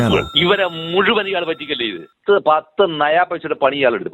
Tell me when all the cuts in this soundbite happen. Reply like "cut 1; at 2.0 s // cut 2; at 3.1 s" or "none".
cut 1; at 2.2 s